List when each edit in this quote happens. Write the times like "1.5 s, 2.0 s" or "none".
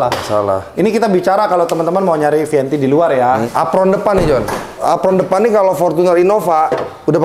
3.4 s, 4.8 s